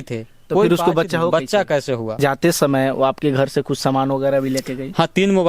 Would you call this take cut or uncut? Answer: cut